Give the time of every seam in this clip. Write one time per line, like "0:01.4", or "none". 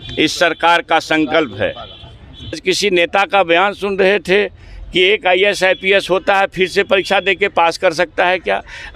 0:02.6